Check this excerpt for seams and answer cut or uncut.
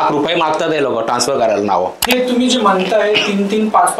cut